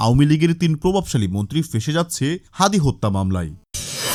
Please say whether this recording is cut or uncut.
uncut